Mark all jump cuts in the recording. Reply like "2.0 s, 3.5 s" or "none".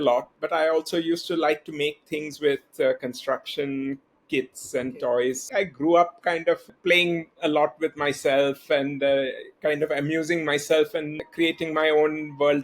5.4 s